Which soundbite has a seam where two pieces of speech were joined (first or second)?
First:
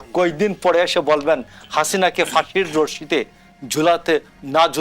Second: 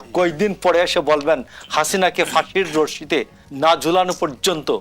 second